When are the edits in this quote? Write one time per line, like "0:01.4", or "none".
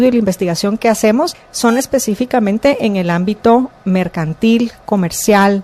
0:01.4